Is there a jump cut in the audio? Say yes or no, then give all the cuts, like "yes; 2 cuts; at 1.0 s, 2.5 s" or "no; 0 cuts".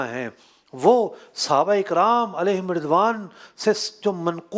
no; 0 cuts